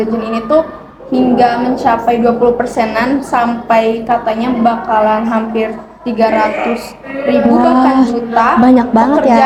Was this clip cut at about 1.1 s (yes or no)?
no